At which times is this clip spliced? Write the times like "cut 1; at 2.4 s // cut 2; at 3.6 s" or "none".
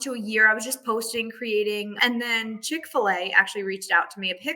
cut 1; at 1.9 s